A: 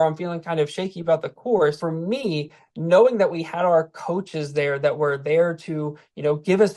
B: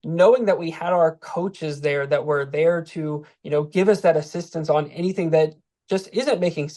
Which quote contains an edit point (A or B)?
A